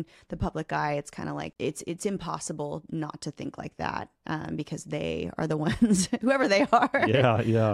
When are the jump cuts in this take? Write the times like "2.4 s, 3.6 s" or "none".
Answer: 1.5 s